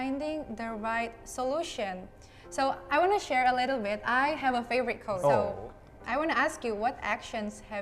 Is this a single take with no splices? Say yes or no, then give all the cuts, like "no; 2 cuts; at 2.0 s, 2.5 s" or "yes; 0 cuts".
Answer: no; 1 cut; at 5.4 s